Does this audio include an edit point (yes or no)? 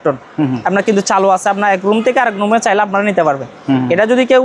no